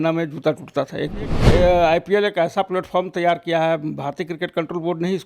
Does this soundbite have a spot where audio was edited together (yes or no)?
yes